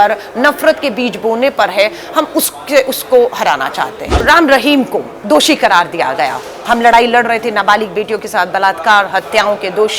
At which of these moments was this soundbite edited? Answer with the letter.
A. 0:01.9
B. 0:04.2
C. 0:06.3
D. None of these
B